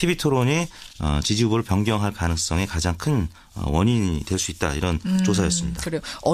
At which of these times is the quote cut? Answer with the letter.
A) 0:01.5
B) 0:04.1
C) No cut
C